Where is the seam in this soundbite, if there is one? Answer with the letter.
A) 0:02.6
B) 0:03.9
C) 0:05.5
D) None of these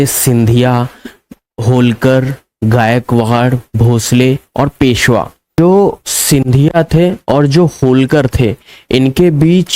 C